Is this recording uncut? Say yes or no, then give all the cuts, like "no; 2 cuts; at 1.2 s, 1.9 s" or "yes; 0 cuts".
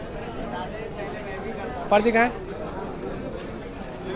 yes; 0 cuts